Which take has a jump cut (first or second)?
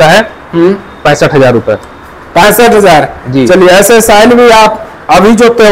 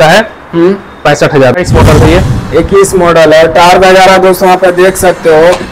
second